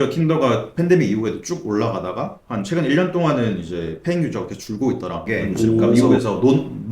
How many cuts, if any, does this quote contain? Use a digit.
1